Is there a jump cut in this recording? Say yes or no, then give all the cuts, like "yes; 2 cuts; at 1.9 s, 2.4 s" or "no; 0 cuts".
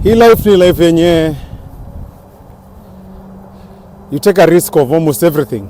no; 0 cuts